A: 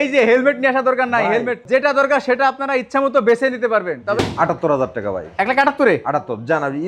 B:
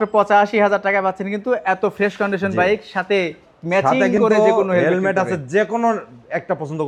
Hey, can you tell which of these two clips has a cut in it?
A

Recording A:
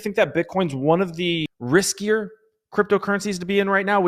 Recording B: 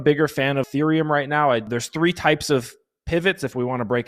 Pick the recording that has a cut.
B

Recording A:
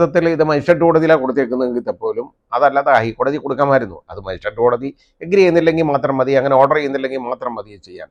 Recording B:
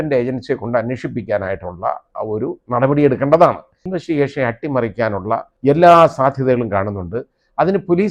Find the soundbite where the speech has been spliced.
B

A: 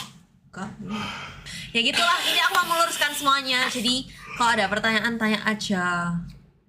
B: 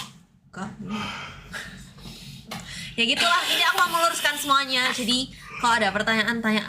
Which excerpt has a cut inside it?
A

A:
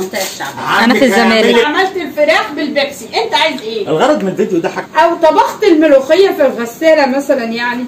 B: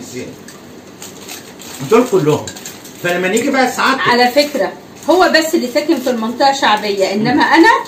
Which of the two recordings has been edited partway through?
A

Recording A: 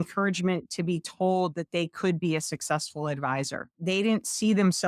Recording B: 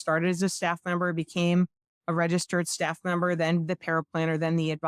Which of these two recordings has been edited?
A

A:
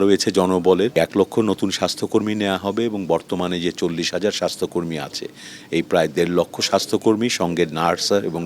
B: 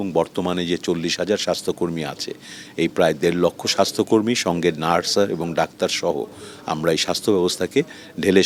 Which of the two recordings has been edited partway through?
A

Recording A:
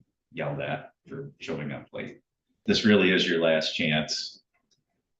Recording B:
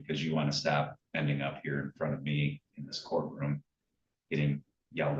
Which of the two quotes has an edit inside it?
A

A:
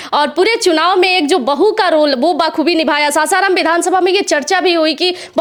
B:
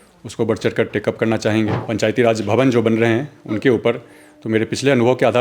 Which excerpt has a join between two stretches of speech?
B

